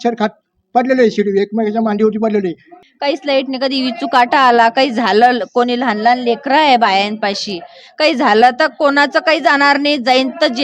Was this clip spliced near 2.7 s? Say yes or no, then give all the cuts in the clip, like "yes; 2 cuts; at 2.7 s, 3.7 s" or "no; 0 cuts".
yes; 1 cut; at 2.7 s